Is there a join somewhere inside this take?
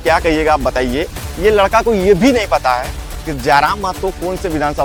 no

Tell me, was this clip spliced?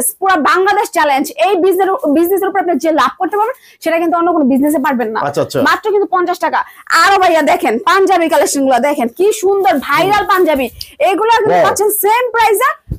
no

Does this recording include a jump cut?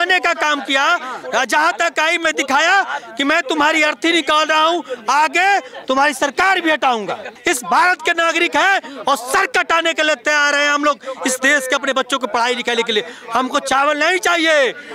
yes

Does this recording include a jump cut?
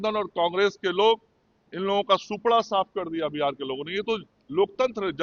no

